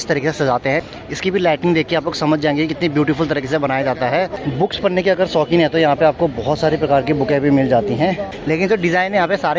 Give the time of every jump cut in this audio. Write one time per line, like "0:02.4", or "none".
0:00.9
0:04.4
0:08.3